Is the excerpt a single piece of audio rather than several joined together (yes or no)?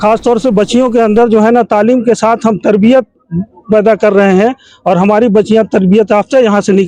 yes